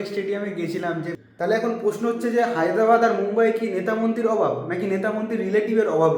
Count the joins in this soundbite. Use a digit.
1